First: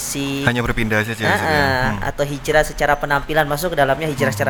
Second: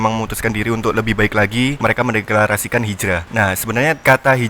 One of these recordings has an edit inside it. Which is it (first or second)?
second